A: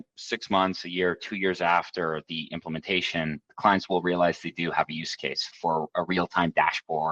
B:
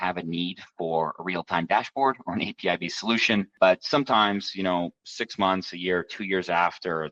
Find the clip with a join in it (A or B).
A